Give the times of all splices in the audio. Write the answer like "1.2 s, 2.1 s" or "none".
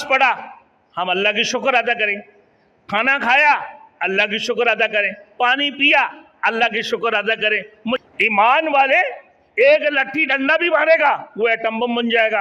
8.0 s